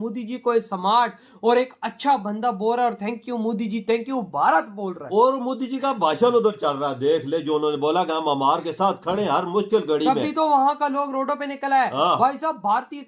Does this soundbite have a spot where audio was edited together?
no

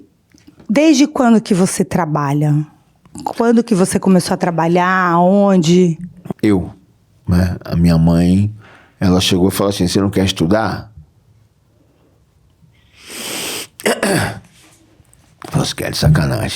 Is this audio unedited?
no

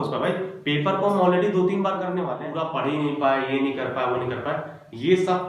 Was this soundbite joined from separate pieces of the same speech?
yes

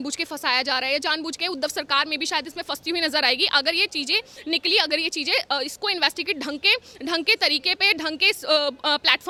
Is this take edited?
no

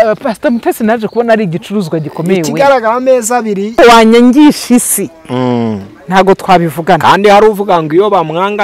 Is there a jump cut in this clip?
yes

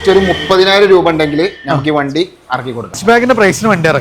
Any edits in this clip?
yes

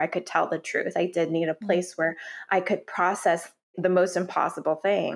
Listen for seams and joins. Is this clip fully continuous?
no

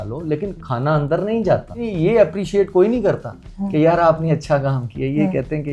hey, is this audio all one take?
no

